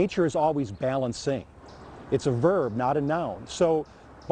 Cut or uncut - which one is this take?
uncut